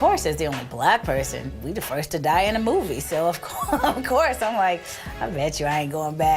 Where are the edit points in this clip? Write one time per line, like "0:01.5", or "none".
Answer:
0:01.4